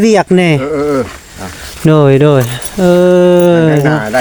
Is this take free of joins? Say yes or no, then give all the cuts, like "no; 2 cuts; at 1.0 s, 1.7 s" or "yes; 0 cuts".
yes; 0 cuts